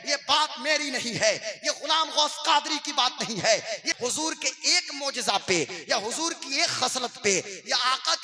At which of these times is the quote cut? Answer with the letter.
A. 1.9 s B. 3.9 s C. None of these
B